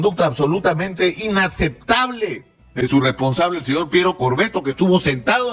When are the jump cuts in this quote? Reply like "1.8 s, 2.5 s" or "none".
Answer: 2.8 s